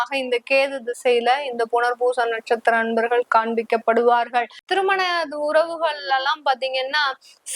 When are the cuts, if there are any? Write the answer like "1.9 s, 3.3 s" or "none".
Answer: 4.7 s